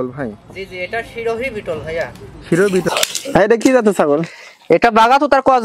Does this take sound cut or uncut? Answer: cut